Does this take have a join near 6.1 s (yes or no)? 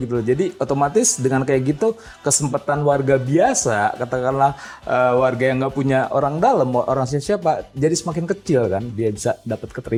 no